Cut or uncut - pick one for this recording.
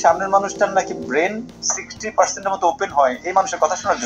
uncut